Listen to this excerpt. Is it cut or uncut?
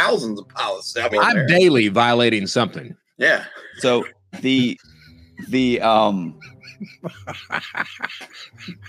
cut